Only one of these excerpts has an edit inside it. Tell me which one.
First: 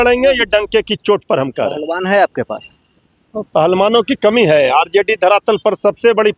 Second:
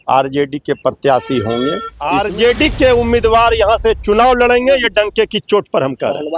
second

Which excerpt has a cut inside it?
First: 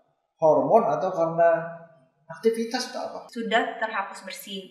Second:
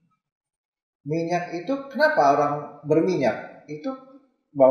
first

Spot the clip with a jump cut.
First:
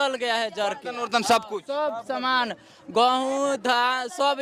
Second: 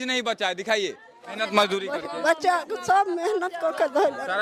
second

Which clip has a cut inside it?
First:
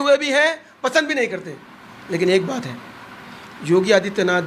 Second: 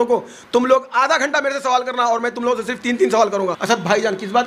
second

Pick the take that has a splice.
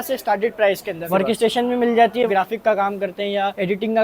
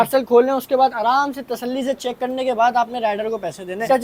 first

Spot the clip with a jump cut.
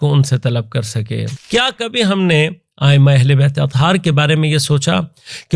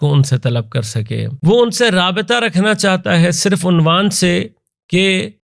first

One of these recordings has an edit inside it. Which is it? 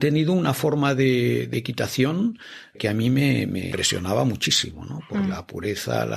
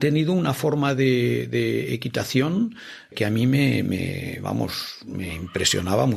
first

